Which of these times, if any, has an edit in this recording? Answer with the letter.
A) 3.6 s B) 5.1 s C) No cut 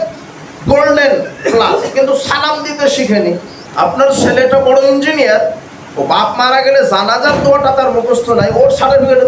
A